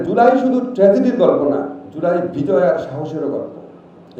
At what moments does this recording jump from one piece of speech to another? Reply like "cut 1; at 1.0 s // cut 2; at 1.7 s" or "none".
none